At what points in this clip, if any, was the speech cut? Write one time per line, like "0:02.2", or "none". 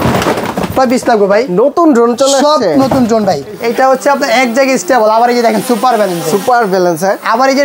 0:03.6